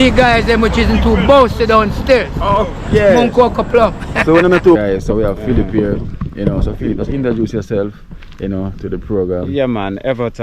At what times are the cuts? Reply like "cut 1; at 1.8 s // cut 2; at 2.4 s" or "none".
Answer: cut 1; at 4.8 s